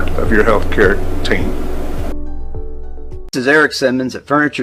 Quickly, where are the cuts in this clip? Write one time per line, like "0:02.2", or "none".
0:03.2